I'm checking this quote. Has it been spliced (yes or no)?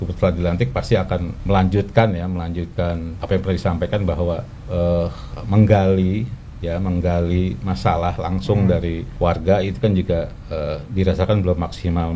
yes